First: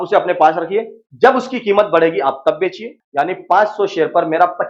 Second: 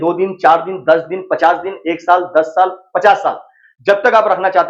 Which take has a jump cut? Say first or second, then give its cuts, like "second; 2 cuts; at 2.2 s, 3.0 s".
first; 1 cut; at 3.0 s